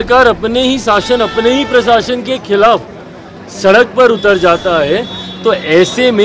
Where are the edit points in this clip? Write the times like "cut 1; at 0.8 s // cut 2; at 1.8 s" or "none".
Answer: none